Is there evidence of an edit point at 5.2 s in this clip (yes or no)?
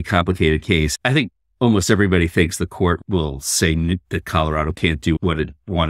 yes